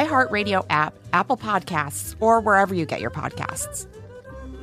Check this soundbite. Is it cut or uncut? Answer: uncut